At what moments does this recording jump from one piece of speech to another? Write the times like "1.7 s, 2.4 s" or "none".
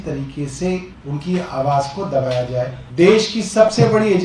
1.0 s, 2.8 s

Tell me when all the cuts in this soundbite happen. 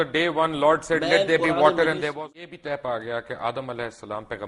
2.1 s

